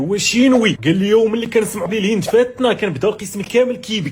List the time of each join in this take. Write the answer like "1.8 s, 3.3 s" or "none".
0.8 s, 1.9 s